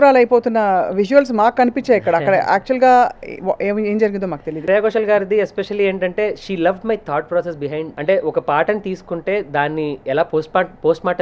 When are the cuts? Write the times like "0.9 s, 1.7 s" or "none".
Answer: 4.6 s, 7.9 s